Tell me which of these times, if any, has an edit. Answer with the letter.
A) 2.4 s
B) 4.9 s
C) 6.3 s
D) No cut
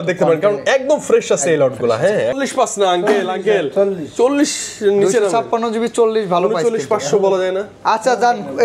A